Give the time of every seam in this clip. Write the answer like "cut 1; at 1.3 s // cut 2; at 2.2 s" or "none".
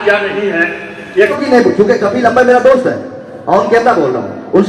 cut 1; at 1.3 s